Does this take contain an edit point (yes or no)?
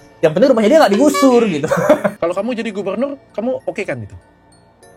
yes